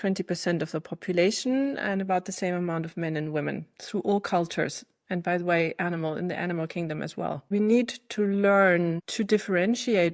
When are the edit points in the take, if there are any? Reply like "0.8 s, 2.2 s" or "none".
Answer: 7.5 s, 9.1 s